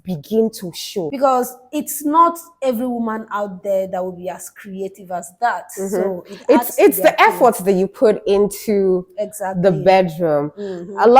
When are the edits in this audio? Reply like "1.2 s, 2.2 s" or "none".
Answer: 1.1 s